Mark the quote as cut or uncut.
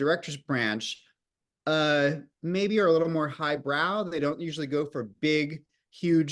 uncut